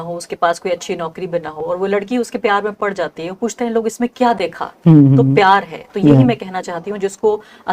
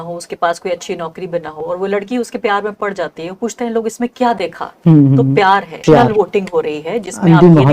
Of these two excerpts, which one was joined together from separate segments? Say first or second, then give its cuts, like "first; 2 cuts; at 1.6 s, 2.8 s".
second; 1 cut; at 5.8 s